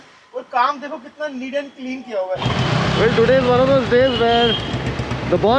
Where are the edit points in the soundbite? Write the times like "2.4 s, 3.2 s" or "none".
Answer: 2.4 s